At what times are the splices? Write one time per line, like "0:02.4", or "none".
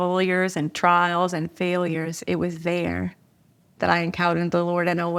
none